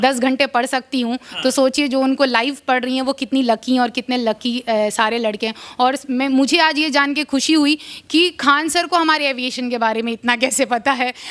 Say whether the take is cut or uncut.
uncut